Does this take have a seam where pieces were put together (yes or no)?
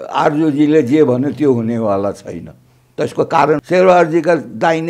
yes